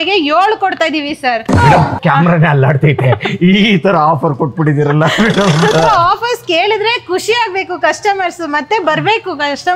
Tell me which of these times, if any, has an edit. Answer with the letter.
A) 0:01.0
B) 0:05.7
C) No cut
B